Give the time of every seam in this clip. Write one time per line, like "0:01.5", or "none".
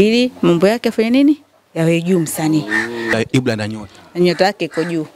0:03.1